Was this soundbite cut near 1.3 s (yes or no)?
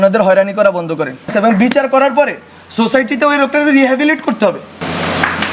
yes